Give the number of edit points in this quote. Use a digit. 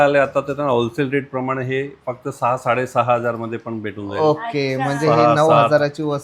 0